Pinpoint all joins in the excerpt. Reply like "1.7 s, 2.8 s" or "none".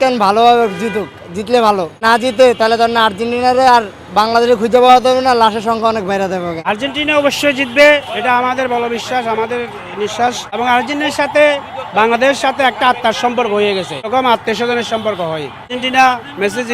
2.0 s, 6.6 s, 10.6 s, 14.1 s, 15.7 s